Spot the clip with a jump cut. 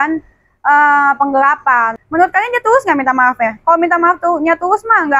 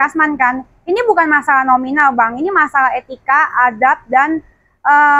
first; 1 cut; at 2.0 s

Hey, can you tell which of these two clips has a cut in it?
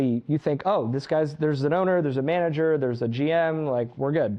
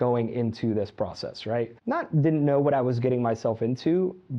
second; 1 cut; at 1.8 s

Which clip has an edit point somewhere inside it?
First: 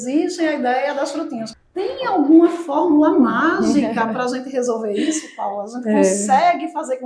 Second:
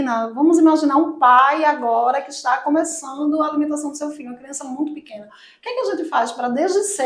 first; 1 cut; at 1.5 s

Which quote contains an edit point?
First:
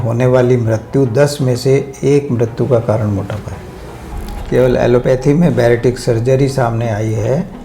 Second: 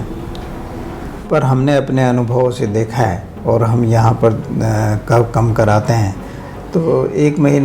first; 1 cut; at 4.3 s

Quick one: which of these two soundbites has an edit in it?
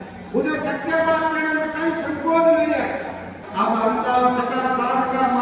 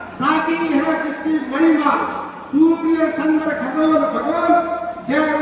first; 1 cut; at 3.3 s

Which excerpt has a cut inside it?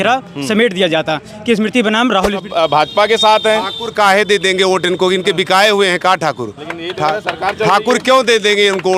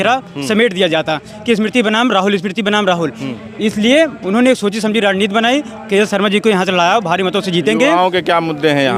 first; 1 cut; at 2.4 s

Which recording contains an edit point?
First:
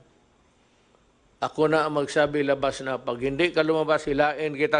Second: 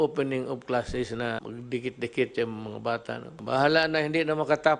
second; 2 cuts; at 1.4 s, 3.3 s

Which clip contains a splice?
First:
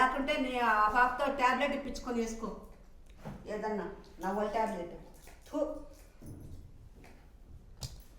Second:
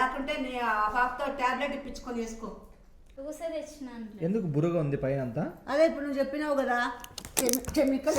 second; 1 cut; at 3.1 s

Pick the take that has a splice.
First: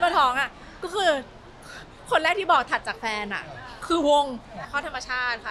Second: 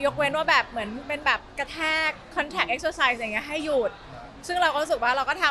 first; 1 cut; at 4.6 s

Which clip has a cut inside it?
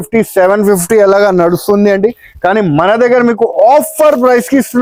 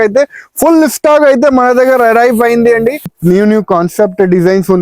second; 1 cut; at 3.1 s

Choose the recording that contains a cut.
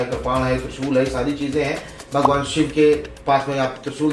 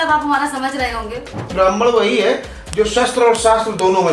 second; 1 cut; at 1.5 s

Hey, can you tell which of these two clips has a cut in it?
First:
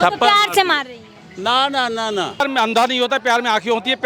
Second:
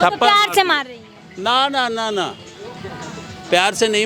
first; 1 cut; at 2.4 s

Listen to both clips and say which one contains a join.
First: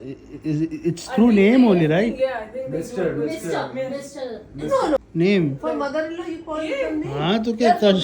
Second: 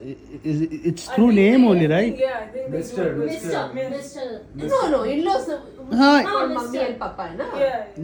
first; 1 cut; at 5.0 s

